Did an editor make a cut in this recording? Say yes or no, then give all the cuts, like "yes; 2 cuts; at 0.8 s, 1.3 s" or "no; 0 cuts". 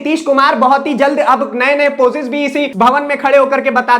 yes; 1 cut; at 2.7 s